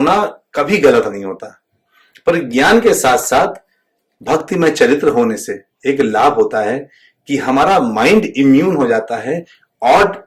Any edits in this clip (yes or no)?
no